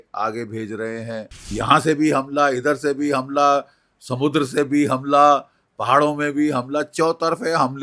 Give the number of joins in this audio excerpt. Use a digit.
1